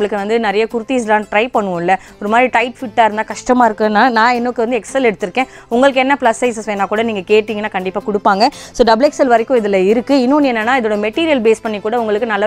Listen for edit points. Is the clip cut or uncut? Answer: uncut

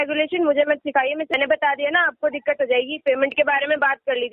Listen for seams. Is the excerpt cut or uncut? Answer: cut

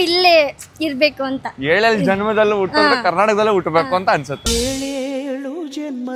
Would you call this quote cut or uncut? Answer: uncut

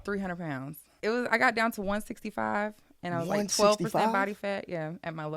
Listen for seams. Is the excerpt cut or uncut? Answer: cut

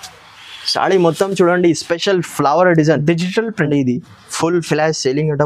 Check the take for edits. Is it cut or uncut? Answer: cut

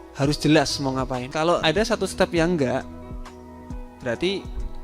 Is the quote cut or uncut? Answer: cut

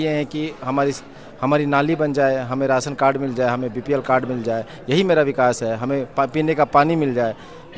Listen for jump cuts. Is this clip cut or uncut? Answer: uncut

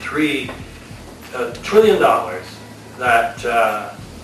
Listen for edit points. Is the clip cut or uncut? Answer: uncut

